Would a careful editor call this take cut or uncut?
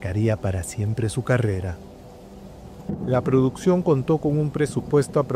uncut